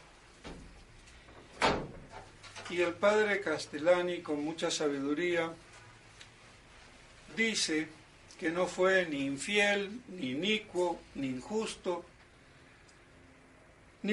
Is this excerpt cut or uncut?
uncut